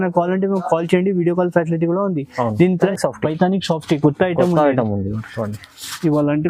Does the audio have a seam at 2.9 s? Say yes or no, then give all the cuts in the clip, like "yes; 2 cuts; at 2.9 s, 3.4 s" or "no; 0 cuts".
yes; 1 cut; at 2.9 s